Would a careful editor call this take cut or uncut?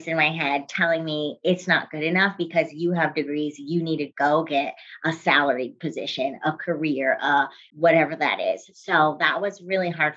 cut